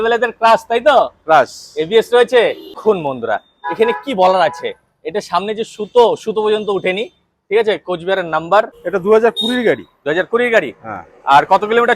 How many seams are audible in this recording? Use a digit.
2